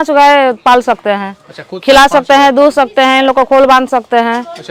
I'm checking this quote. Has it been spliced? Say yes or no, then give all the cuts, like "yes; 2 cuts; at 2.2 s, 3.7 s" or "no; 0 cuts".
no; 0 cuts